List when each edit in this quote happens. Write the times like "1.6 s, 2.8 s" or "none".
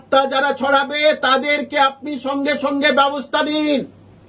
none